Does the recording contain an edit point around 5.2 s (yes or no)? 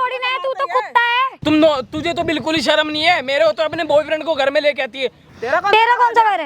yes